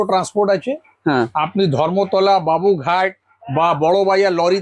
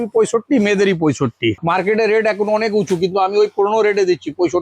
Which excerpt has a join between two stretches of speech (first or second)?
second